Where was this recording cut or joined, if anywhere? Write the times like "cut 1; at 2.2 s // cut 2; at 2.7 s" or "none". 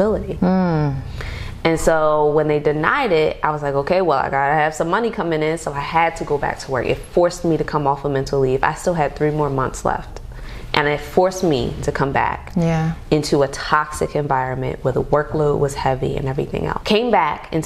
cut 1; at 16.8 s